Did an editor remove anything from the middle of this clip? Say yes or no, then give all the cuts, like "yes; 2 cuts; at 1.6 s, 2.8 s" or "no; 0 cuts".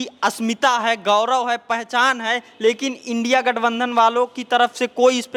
no; 0 cuts